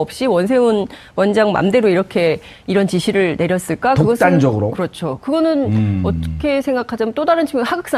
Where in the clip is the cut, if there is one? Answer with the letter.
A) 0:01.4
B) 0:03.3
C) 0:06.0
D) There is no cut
C